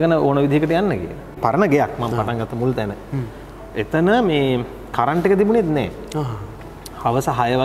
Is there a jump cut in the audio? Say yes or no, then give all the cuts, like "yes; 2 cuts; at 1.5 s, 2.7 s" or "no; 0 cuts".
yes; 1 cut; at 1.4 s